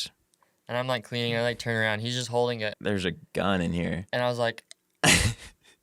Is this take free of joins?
no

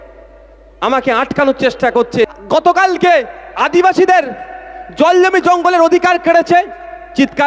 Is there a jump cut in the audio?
yes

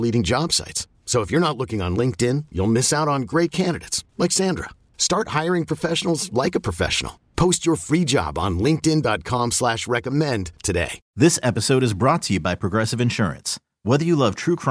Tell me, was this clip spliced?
yes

